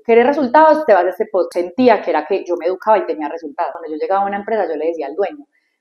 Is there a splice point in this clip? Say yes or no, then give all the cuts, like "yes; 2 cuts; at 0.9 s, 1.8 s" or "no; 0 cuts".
yes; 2 cuts; at 1.5 s, 3.8 s